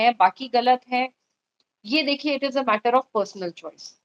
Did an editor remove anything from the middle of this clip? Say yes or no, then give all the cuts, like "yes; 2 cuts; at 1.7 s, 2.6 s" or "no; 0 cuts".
no; 0 cuts